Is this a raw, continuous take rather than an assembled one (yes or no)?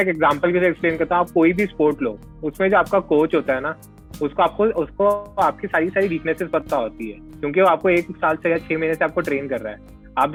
yes